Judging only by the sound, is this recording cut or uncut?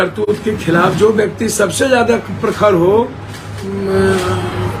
cut